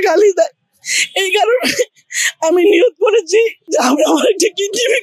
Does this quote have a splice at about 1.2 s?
no; 1 cut; at 3.6 s

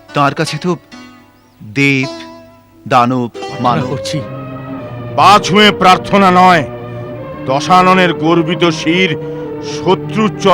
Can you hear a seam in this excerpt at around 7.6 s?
no; 1 cut; at 3.8 s

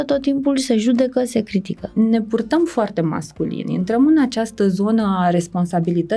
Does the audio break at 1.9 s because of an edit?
yes; 1 cut; at 1.9 s

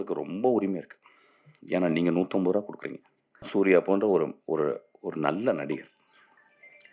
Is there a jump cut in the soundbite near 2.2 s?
no; 1 cut; at 3.5 s

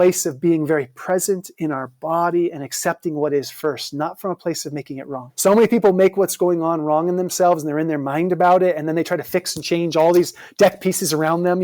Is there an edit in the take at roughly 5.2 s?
yes; 1 cut; at 5.2 s

